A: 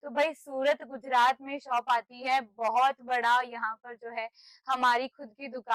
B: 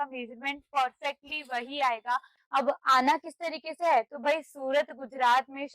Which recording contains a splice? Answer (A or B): B